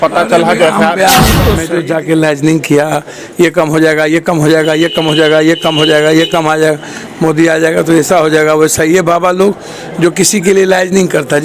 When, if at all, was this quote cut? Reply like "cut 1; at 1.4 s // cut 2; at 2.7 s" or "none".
cut 1; at 1.6 s